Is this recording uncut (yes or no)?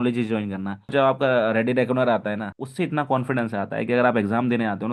no